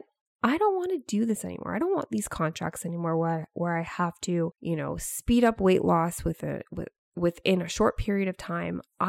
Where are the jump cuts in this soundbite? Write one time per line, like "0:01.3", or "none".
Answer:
0:04.6